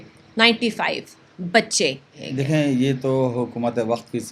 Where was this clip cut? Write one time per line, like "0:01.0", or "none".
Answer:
0:02.1